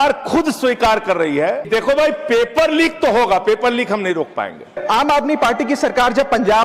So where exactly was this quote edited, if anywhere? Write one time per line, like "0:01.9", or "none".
0:01.7
0:04.7